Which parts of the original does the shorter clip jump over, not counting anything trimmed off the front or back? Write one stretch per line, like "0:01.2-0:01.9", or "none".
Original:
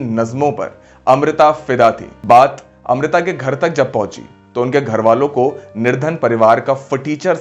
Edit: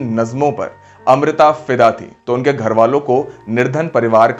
0:02.1-0:04.4